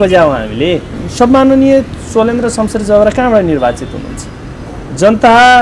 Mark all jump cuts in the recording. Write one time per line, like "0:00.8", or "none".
0:01.0